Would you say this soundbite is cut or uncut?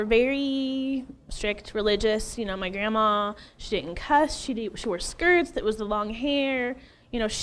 uncut